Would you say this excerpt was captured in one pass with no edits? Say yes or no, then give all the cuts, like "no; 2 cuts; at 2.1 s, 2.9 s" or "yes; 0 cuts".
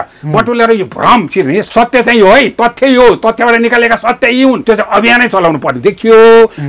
no; 2 cuts; at 1.7 s, 4.6 s